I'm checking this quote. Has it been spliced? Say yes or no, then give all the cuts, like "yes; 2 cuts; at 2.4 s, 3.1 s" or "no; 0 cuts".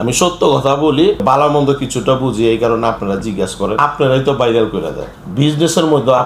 yes; 3 cuts; at 1.2 s, 3.8 s, 5.1 s